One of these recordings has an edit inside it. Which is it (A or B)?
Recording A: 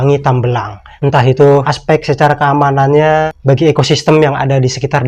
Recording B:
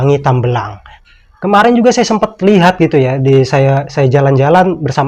A